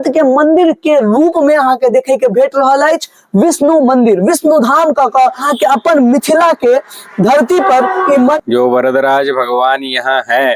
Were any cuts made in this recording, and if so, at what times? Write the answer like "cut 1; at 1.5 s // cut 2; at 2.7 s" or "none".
cut 1; at 5.4 s // cut 2; at 8.4 s